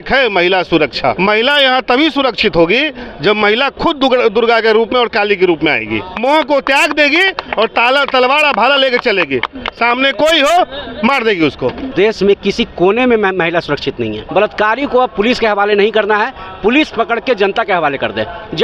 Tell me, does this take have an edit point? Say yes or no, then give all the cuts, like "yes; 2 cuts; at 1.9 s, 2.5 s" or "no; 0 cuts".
yes; 4 cuts; at 1.2 s, 6.2 s, 11.9 s, 14.2 s